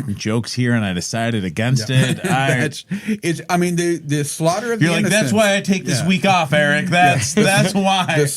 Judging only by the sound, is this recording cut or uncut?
uncut